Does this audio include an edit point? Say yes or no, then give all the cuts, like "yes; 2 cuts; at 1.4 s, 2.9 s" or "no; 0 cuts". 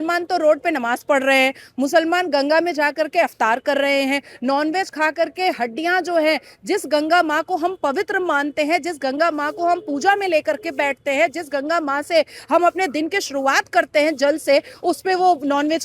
no; 0 cuts